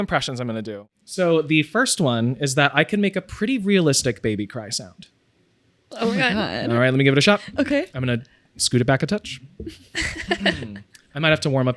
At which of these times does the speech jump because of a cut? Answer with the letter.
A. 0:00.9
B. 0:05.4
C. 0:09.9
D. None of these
A